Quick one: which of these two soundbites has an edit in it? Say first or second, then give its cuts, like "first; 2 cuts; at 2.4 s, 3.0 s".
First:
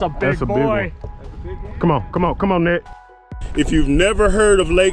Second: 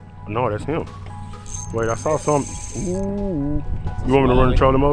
first; 1 cut; at 3.4 s